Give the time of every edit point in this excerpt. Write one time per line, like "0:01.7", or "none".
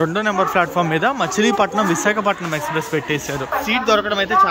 0:03.5